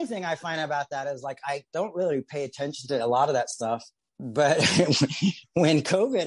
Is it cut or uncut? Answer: cut